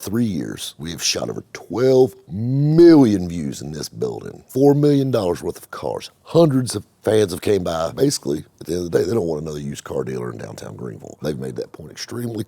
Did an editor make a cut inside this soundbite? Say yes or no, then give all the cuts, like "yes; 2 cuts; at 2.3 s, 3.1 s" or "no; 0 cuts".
yes; 4 cuts; at 0.9 s, 4.3 s, 7.9 s, 11.2 s